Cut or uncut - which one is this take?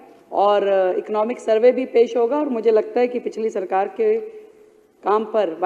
uncut